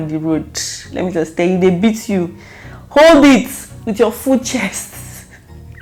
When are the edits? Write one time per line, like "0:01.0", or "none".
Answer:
none